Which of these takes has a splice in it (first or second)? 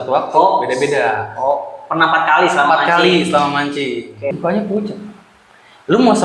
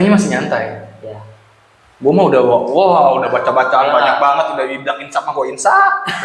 first